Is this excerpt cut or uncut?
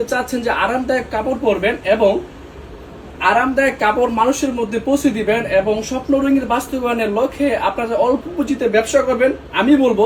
uncut